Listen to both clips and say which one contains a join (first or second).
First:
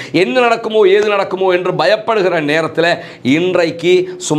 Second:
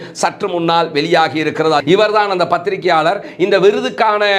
second